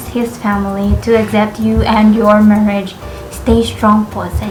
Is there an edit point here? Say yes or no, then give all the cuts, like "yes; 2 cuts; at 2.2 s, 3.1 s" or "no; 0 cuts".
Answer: no; 0 cuts